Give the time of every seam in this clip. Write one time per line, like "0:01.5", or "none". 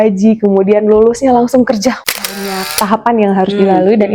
0:02.4